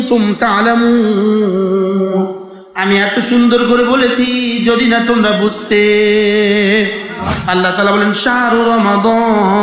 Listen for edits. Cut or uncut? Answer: cut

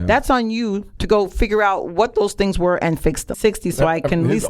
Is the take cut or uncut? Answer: cut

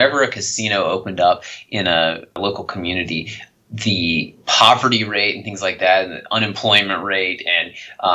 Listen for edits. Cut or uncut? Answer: cut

